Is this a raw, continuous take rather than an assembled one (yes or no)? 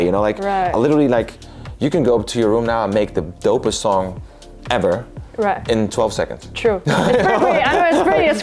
yes